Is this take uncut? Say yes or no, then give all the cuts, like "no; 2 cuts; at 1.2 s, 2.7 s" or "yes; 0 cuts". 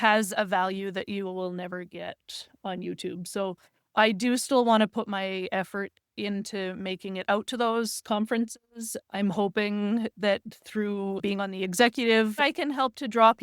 no; 2 cuts; at 11.2 s, 12.4 s